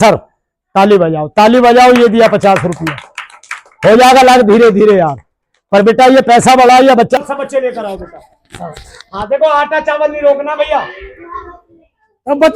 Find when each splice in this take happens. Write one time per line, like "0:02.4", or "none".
0:07.2